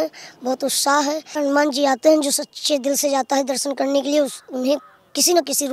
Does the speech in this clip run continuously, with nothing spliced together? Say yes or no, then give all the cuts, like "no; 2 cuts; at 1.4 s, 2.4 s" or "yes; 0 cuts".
no; 1 cut; at 1.3 s